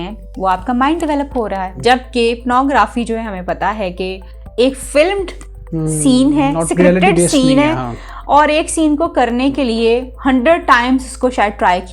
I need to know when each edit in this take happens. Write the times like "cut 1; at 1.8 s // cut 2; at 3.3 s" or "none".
cut 1; at 1.7 s